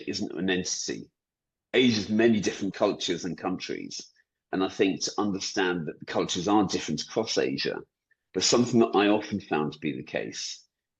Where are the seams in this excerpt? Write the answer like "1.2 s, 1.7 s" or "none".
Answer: 2.7 s, 6.0 s